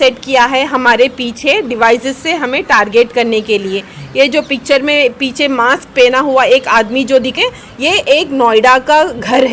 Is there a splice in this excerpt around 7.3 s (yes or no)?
yes